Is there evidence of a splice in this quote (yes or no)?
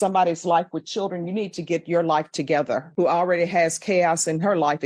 yes